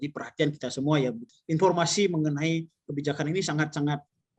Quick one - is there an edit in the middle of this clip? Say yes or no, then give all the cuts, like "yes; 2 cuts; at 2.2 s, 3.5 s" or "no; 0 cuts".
yes; 1 cut; at 1.2 s